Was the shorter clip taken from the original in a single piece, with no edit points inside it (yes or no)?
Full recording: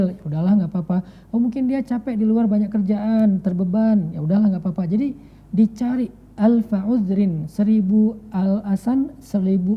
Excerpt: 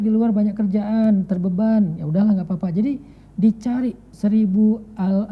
no